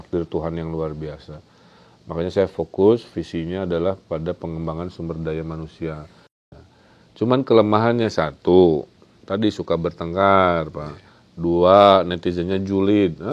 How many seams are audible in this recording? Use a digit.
1